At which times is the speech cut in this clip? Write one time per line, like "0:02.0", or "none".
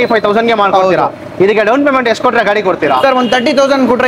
none